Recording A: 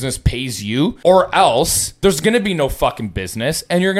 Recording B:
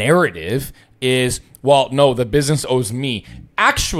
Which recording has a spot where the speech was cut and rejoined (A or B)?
A